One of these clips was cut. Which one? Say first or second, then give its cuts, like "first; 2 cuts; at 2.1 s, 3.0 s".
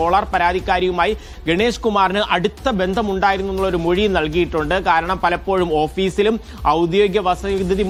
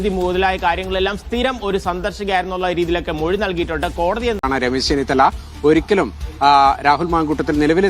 second; 1 cut; at 4.5 s